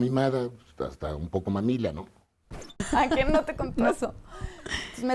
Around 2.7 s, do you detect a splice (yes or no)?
yes